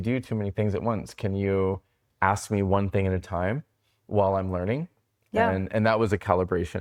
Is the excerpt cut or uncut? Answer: uncut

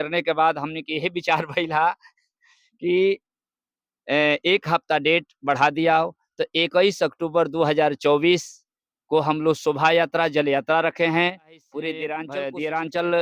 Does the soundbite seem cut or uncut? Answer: cut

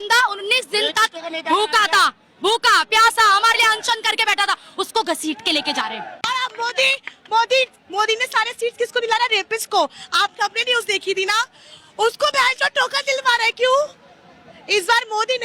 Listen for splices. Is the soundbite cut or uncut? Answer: cut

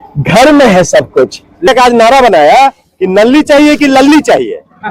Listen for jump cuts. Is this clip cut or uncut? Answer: cut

